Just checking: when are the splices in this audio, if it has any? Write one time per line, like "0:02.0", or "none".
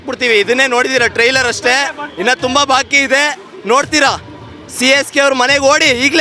none